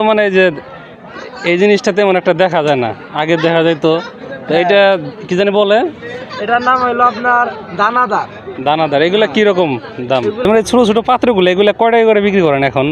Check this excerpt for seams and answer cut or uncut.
cut